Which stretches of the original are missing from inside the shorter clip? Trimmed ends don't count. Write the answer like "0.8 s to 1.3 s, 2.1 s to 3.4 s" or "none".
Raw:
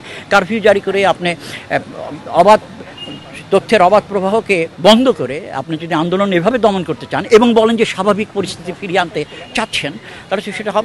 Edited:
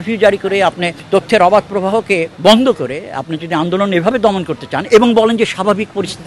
1.3 s to 3.3 s